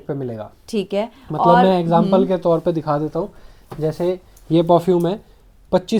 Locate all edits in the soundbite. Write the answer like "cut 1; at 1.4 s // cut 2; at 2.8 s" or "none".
none